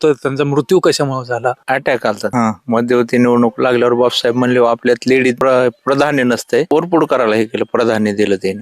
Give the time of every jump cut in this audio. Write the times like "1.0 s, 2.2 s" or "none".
1.6 s, 2.2 s, 5.4 s, 6.7 s